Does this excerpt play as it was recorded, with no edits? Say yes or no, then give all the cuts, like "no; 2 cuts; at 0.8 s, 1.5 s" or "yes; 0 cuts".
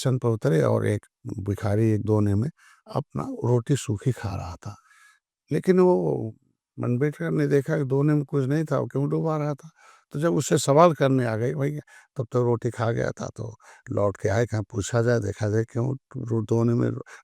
yes; 0 cuts